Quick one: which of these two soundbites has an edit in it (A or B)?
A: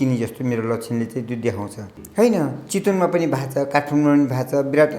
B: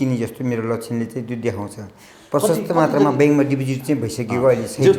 A